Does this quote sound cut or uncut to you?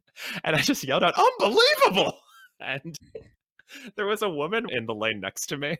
cut